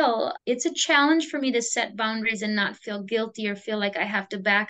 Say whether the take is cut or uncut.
uncut